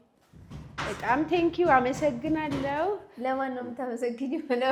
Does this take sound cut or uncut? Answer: uncut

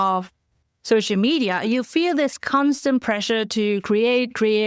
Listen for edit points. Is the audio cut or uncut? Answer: uncut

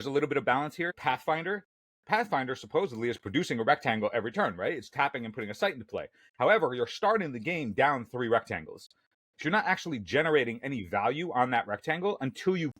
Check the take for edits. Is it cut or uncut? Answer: cut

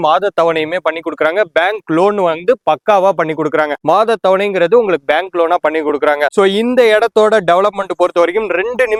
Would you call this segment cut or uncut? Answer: uncut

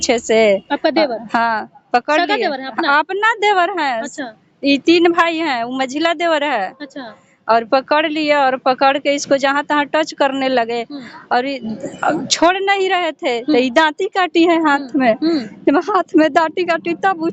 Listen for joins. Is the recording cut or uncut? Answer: uncut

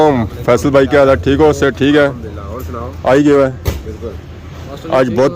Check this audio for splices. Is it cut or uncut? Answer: uncut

